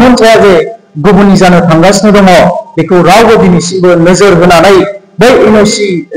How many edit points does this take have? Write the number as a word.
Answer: zero